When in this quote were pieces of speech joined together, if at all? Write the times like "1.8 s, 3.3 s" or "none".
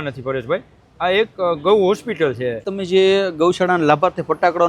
2.7 s

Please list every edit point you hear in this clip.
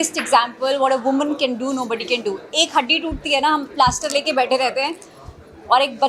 none

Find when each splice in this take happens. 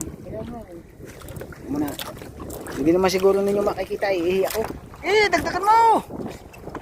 4.9 s

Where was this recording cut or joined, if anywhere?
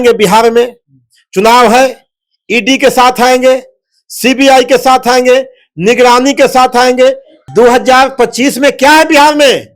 7.3 s

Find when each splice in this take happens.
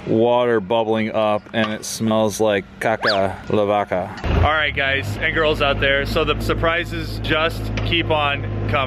4.2 s

